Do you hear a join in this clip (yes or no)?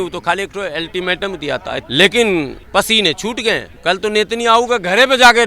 yes